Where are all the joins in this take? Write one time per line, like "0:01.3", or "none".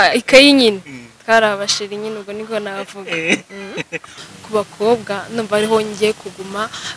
0:04.1